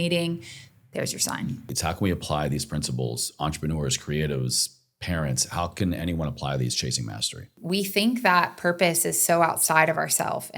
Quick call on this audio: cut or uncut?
cut